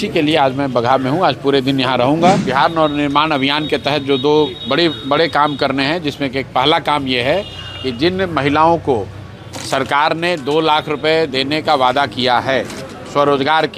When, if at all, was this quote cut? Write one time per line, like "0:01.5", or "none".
0:02.4